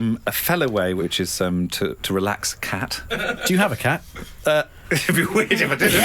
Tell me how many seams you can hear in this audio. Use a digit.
2